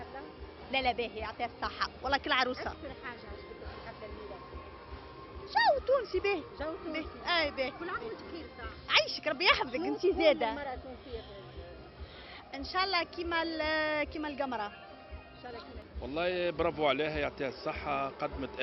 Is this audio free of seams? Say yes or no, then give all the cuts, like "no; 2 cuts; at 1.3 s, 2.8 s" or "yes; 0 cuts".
yes; 0 cuts